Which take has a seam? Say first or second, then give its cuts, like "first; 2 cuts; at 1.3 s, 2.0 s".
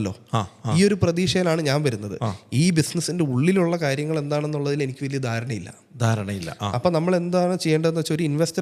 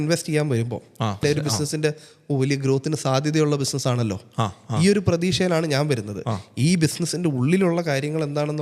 second; 1 cut; at 1.2 s